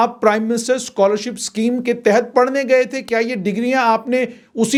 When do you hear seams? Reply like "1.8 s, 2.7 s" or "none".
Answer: none